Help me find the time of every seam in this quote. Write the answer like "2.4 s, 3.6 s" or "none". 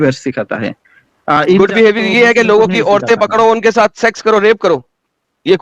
none